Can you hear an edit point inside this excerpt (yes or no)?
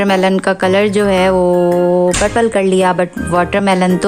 no